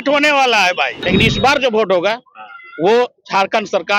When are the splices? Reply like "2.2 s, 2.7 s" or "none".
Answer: 1.0 s